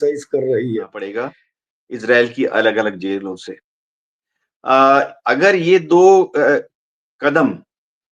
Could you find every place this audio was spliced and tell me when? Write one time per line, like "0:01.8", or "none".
0:01.1